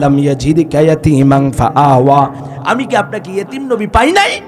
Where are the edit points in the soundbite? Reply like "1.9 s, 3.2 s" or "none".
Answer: 2.4 s